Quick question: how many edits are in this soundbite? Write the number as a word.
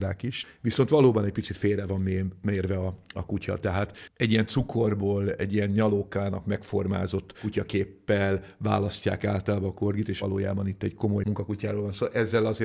two